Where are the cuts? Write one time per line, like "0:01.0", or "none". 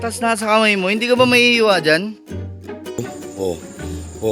0:03.0